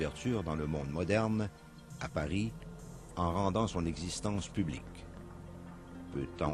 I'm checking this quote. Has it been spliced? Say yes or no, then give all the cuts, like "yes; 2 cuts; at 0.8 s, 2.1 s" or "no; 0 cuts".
yes; 1 cut; at 3.7 s